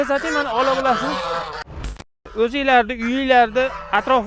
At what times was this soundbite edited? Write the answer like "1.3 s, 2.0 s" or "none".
1.7 s